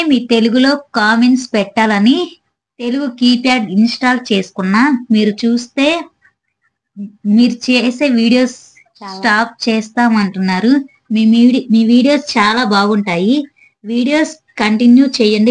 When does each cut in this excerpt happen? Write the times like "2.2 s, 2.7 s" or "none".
none